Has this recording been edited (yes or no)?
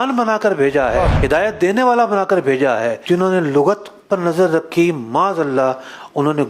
yes